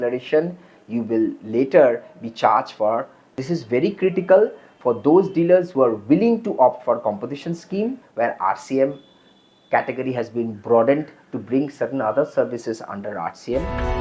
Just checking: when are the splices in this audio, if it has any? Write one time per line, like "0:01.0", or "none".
0:03.4
0:08.0